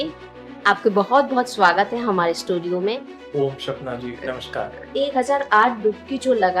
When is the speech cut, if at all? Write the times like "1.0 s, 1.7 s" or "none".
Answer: 3.1 s, 4.9 s